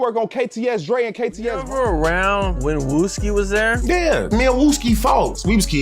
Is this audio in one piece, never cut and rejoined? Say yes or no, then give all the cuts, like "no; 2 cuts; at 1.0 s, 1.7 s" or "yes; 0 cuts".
no; 1 cut; at 1.7 s